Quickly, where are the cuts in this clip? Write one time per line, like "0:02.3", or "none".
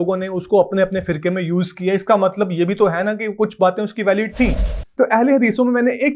0:04.8